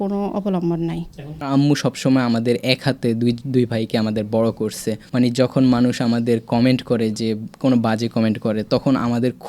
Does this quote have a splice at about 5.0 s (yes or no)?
yes